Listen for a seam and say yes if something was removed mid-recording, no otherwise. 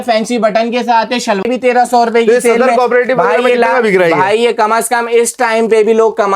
yes